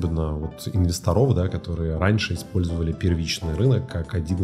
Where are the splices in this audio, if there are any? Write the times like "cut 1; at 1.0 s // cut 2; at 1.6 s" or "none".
none